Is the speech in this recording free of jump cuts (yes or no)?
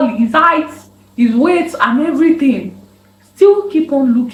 yes